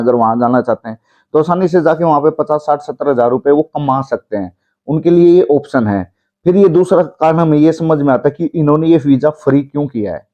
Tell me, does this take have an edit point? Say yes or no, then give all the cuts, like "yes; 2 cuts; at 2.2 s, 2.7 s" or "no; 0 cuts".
no; 0 cuts